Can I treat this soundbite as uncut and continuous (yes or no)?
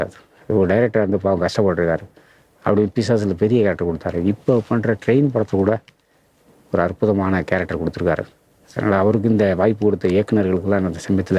yes